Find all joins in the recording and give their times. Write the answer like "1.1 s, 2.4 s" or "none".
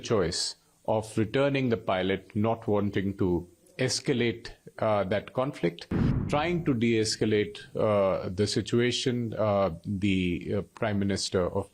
6.2 s